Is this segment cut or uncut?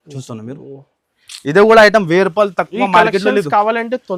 uncut